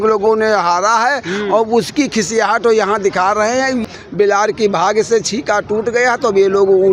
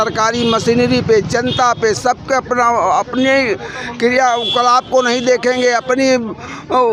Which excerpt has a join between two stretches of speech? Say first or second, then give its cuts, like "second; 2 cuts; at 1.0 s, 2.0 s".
first; 1 cut; at 3.8 s